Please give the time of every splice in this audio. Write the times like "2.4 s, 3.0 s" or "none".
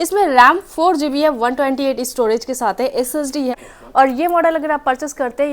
3.5 s